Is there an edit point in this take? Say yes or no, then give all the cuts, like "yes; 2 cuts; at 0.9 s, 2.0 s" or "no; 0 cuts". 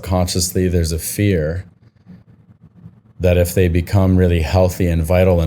no; 0 cuts